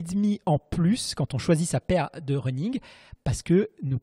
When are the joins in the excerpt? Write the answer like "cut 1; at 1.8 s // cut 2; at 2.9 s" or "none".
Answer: none